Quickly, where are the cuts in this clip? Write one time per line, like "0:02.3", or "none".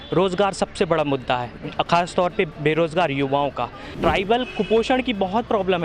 0:03.9

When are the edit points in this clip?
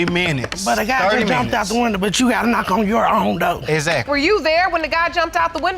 none

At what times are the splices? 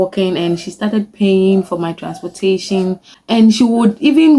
0:03.1

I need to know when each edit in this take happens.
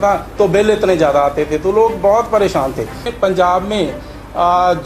0:03.0

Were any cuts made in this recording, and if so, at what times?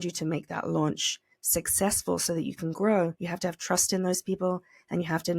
0:03.2

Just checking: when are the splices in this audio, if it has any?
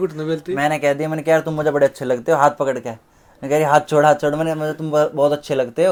none

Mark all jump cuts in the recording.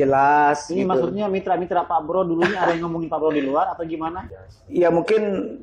0:04.2

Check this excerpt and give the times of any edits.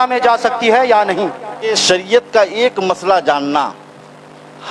0:01.8

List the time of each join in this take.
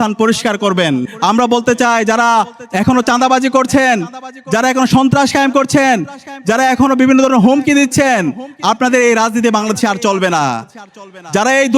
0:01.1

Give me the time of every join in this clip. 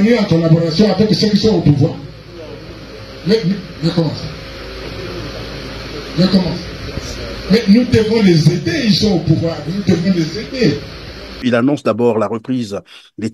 0:11.4

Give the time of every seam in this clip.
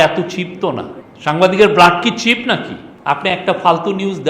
0:02.9

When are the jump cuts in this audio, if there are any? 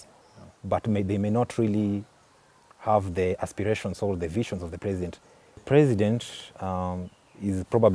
0:05.6

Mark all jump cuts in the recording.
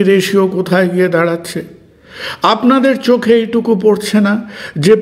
0:01.1

